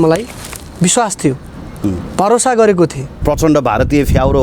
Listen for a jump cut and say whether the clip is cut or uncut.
cut